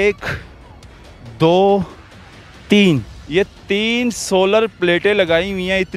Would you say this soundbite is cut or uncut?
cut